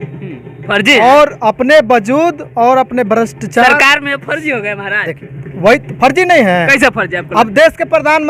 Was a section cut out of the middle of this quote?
no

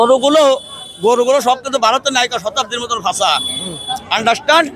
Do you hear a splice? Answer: no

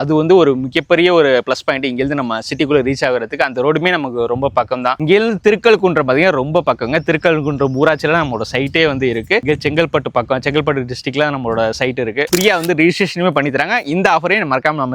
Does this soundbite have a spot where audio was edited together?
yes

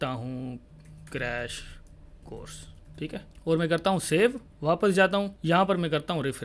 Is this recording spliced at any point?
yes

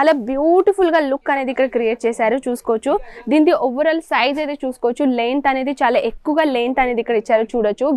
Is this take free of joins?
yes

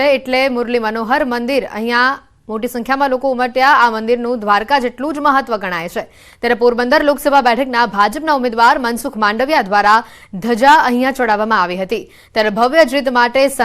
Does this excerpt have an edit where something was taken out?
no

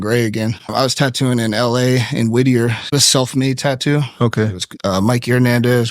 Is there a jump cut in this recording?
yes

